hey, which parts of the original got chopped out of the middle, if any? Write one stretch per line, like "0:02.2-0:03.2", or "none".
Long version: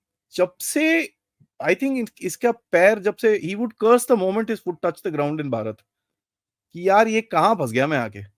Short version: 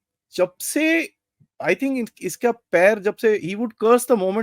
none